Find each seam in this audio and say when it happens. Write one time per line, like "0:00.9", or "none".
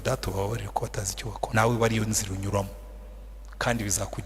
0:01.5